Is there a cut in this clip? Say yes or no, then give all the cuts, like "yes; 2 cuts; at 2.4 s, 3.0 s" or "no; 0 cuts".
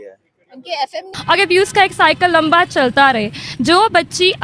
yes; 1 cut; at 1.2 s